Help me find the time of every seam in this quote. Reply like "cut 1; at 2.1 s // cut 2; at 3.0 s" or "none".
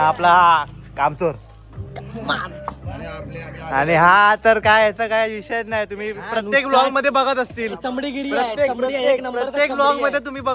none